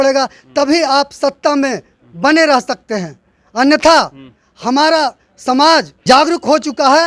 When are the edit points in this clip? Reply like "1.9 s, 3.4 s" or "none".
5.9 s